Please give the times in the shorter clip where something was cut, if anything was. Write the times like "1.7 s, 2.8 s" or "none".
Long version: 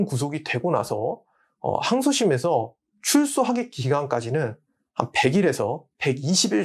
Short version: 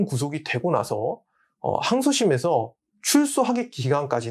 none